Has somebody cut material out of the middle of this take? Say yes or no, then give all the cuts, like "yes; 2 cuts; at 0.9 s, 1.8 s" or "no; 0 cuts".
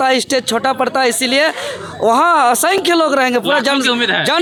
no; 0 cuts